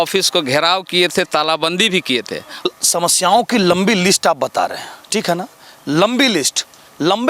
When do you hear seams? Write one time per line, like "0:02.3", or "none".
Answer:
0:02.7